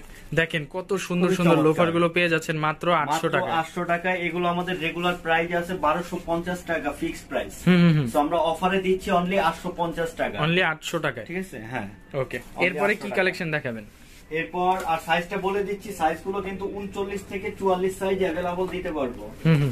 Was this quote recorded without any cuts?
yes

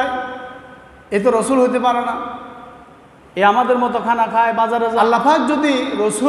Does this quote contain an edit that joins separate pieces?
yes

